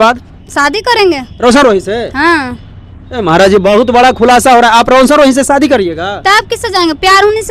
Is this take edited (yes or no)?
no